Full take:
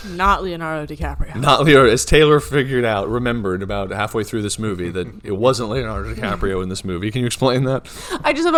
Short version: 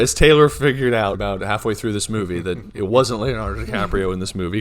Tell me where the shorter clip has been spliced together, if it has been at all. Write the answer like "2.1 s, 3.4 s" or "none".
1.2 s